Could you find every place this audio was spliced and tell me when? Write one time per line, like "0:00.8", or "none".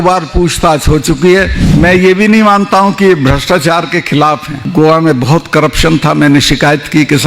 0:01.6
0:04.6